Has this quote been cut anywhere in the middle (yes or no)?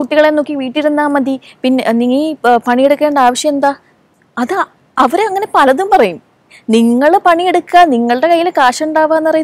no